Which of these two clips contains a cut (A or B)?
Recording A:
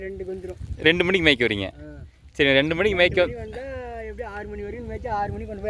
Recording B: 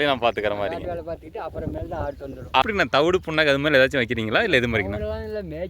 B